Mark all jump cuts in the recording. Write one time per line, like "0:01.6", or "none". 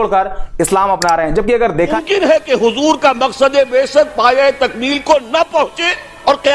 0:01.9